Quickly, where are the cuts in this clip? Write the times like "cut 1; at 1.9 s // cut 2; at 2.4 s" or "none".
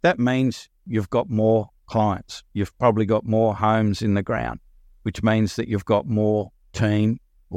cut 1; at 6.6 s

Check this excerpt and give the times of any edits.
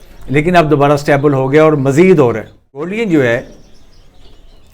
cut 1; at 2.9 s

